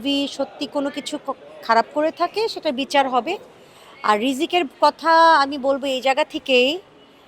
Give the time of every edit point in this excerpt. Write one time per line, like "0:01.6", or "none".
none